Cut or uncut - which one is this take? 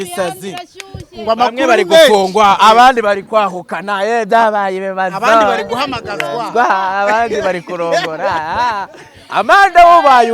uncut